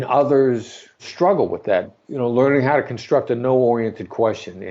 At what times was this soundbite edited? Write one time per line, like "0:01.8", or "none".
0:01.0
0:01.9